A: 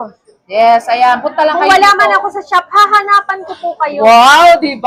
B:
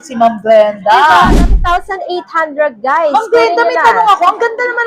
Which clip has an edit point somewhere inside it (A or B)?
B